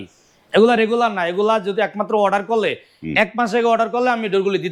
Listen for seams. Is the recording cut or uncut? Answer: uncut